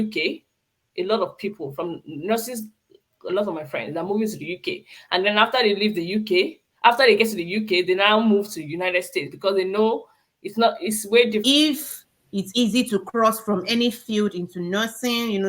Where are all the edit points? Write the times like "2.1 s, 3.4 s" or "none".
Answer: 11.4 s